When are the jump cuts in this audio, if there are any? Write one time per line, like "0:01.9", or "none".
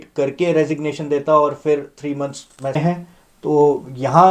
0:02.8